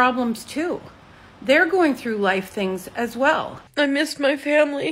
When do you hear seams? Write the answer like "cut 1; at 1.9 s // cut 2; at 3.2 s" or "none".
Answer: cut 1; at 3.6 s